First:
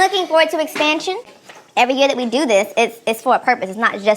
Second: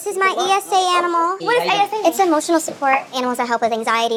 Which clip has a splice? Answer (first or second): first